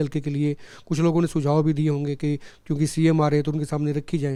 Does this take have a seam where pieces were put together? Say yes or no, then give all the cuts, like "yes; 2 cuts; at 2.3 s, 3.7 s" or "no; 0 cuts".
no; 0 cuts